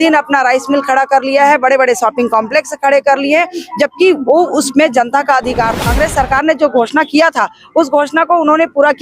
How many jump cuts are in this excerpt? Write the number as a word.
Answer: one